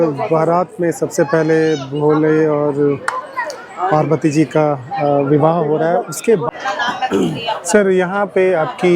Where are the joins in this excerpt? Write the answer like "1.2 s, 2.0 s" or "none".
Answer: 6.5 s